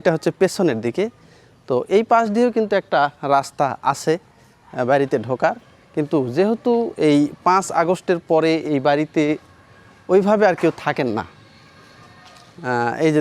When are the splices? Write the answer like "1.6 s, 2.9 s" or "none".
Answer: none